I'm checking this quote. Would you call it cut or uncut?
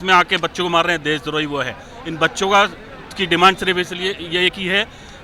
uncut